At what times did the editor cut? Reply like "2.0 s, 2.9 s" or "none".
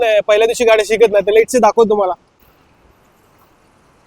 2.4 s